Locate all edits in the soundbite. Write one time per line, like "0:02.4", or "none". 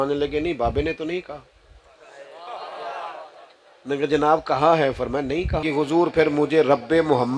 0:05.7